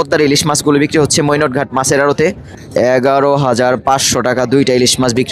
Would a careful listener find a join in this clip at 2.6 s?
yes; 1 cut; at 2.6 s

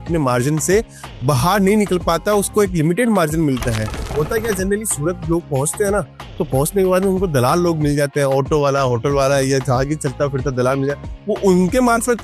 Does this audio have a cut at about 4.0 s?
yes; 1 cut; at 4.0 s

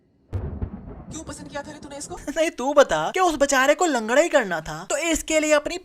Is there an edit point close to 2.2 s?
yes; 1 cut; at 2.2 s

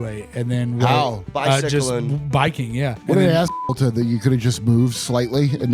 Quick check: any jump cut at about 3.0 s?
yes; 2 cuts; at 1.2 s, 3.0 s

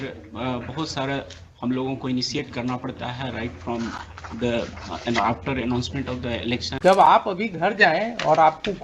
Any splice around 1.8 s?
no; 1 cut; at 6.7 s

